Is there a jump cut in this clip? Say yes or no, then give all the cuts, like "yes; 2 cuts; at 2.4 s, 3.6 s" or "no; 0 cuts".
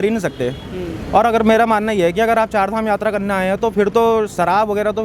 no; 0 cuts